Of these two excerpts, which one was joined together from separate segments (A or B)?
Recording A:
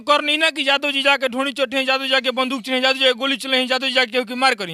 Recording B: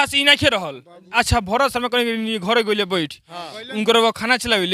B